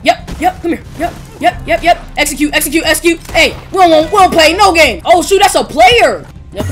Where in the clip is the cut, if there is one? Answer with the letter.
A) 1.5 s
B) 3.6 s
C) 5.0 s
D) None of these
C